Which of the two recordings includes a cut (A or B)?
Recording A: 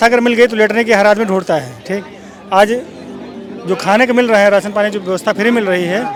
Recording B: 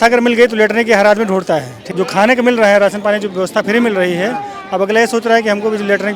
B